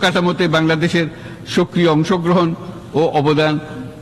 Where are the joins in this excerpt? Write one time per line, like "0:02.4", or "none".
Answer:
none